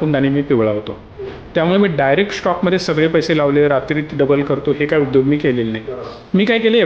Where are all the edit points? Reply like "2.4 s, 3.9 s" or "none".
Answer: none